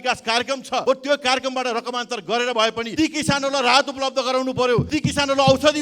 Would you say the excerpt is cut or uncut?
cut